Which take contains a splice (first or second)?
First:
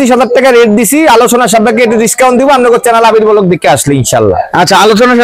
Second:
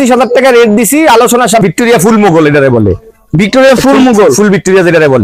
second